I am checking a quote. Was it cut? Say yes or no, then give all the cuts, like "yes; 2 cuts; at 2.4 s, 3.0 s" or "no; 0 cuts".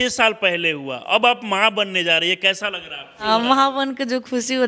yes; 1 cut; at 3.2 s